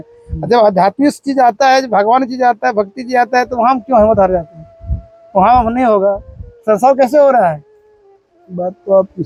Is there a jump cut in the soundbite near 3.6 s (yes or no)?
no